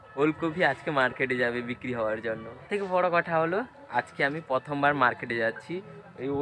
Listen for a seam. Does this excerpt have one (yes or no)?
yes